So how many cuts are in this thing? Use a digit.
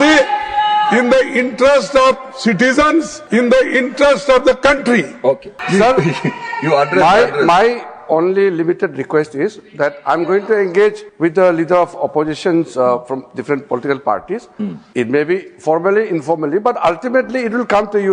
4